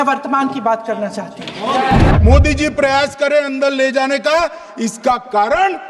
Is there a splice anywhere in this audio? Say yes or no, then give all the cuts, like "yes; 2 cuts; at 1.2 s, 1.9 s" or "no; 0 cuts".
yes; 1 cut; at 2.1 s